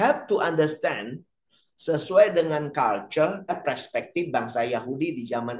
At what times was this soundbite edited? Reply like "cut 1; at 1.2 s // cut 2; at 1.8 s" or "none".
cut 1; at 3.6 s